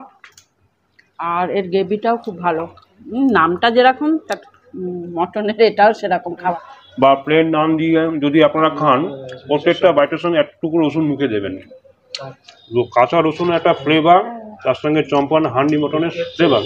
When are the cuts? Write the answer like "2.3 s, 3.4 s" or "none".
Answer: 6.6 s